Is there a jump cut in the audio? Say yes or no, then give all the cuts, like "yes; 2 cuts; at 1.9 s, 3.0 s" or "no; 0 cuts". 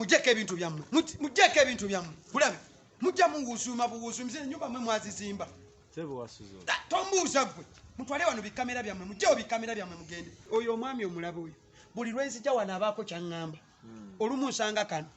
yes; 1 cut; at 10.4 s